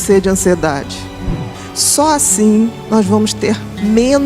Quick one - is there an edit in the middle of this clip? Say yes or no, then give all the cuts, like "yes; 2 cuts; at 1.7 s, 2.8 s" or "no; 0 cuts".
yes; 1 cut; at 1.4 s